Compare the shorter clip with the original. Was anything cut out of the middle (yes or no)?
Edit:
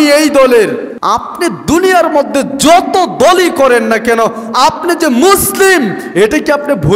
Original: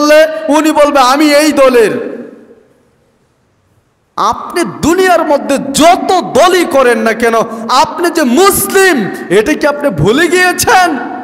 yes